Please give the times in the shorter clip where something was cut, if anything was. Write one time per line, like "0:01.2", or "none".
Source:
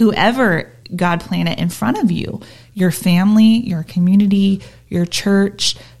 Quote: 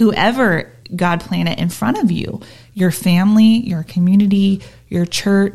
none